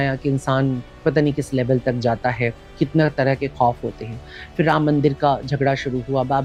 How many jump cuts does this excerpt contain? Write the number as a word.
zero